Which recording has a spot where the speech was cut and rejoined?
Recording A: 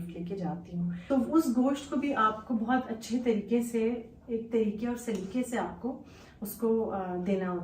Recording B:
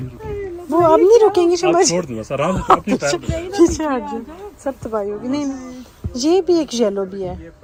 A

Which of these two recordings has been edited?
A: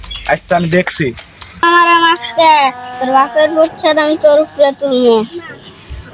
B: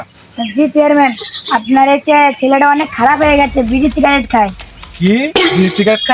A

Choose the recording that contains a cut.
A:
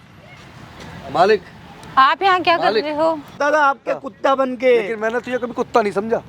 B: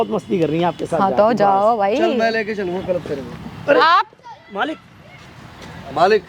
A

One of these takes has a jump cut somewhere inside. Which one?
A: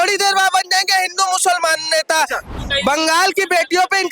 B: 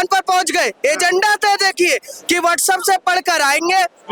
A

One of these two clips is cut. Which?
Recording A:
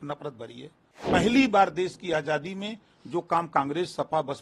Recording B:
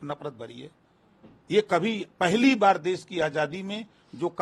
A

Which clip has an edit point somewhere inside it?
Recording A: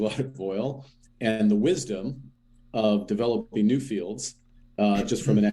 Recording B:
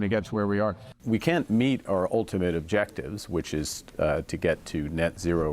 B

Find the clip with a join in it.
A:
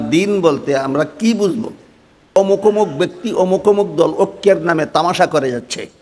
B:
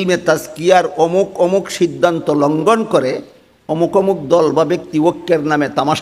A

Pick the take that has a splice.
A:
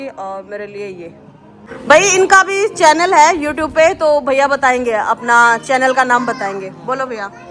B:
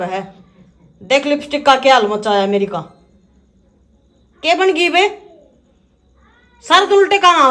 A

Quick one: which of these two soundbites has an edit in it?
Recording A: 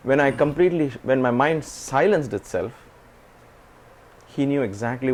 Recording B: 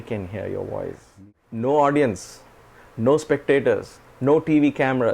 B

